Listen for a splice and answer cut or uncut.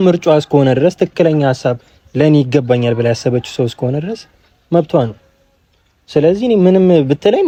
uncut